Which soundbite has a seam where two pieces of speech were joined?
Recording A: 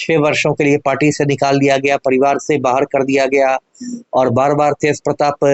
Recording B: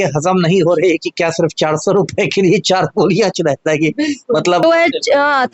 B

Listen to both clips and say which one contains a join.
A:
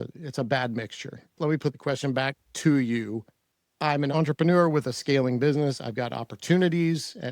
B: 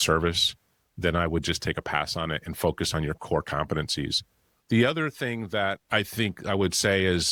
A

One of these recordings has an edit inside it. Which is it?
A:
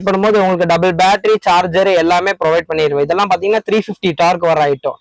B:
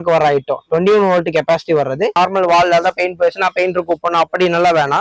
B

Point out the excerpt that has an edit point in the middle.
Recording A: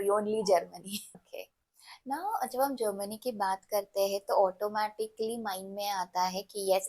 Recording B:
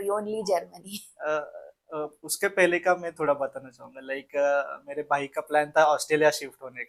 A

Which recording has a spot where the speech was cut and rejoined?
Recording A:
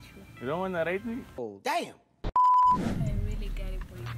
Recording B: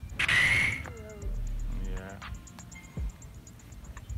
A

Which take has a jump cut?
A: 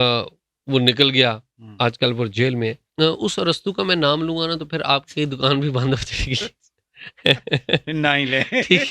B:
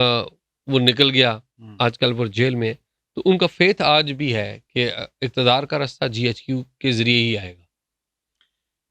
A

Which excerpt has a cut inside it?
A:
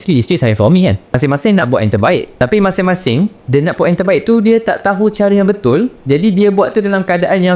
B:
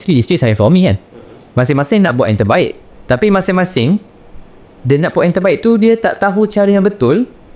A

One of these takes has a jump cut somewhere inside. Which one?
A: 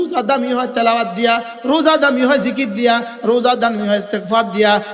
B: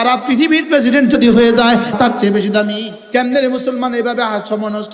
B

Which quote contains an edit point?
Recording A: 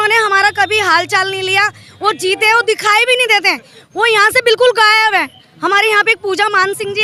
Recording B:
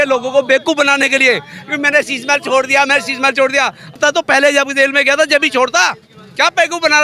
B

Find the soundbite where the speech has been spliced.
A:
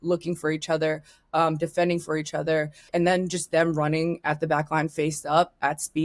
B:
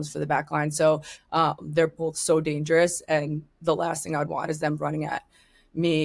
A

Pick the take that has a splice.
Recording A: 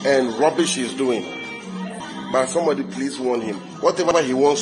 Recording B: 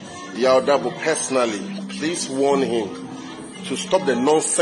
A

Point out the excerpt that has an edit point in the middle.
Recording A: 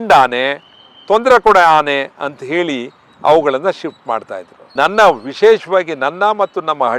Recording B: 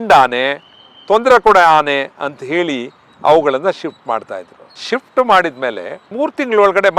B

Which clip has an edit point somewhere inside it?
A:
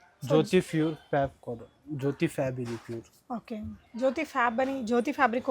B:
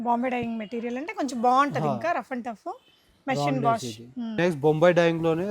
B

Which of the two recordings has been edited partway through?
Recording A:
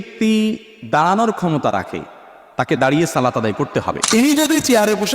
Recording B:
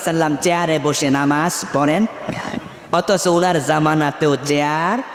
A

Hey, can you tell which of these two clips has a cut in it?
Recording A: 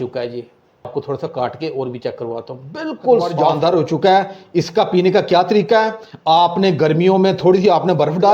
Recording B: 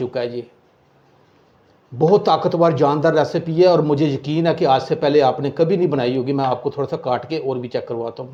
A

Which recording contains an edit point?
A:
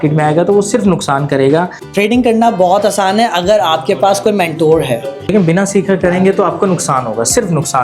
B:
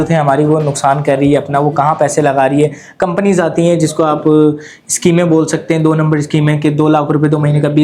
A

